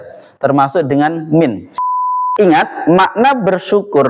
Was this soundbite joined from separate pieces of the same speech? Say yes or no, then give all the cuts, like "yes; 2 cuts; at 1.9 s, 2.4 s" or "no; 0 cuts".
yes; 1 cut; at 2.1 s